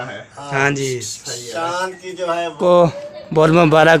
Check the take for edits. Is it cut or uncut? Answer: cut